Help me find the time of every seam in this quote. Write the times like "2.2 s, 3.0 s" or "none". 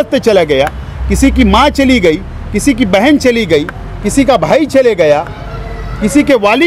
none

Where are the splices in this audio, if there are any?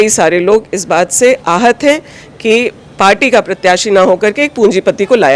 none

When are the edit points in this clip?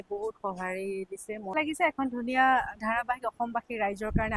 1.5 s

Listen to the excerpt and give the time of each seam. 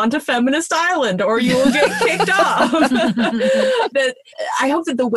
3.9 s

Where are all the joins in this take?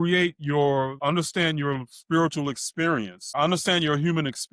0.9 s, 3.4 s

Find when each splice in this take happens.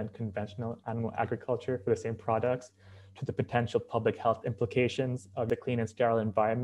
5.5 s

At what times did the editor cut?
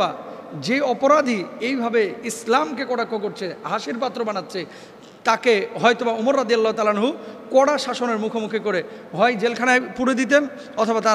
none

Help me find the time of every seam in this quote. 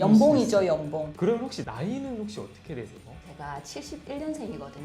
1.1 s

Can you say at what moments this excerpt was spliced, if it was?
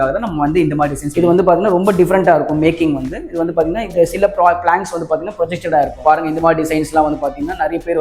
1.0 s, 5.9 s

